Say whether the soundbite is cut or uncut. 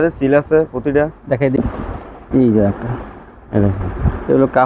cut